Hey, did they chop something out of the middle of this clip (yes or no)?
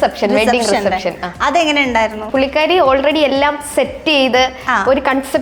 yes